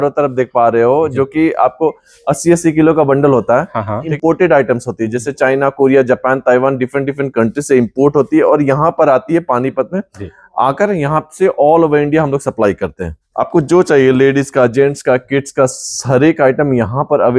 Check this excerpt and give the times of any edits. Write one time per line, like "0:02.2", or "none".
0:04.1
0:13.2